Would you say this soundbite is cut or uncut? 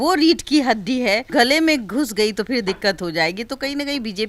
uncut